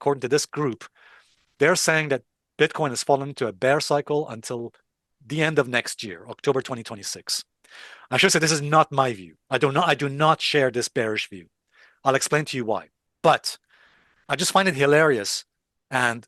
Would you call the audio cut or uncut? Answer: uncut